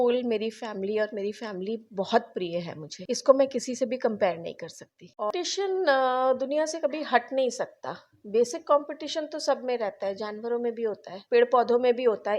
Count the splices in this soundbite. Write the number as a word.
one